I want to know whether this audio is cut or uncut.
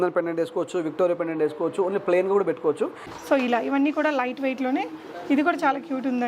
cut